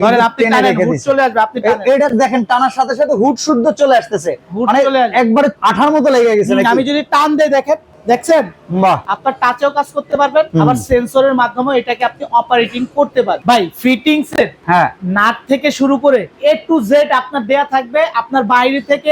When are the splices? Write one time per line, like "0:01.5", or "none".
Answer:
0:05.6
0:07.9
0:09.1
0:10.5
0:13.4
0:14.6
0:16.3